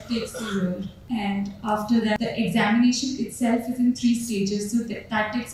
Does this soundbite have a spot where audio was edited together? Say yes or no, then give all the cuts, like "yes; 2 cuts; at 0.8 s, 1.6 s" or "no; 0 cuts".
yes; 2 cuts; at 0.9 s, 2.2 s